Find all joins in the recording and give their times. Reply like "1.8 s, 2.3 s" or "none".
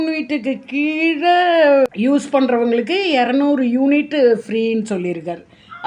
1.9 s